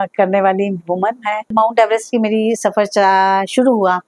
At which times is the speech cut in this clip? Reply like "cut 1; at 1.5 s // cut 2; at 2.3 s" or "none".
cut 1; at 1.5 s